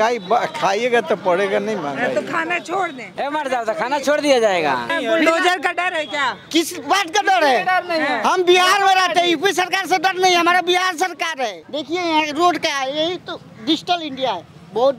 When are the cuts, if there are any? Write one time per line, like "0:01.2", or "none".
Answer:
0:03.2
0:04.9
0:11.6